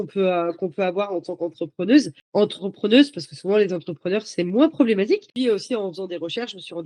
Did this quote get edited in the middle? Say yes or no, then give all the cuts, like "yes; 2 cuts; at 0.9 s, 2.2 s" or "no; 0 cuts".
no; 0 cuts